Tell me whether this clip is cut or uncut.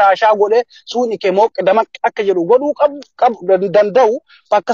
uncut